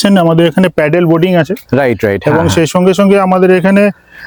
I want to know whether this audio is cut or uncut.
uncut